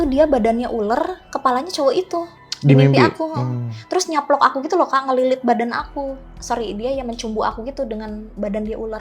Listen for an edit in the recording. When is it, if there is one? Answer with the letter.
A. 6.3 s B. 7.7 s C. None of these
A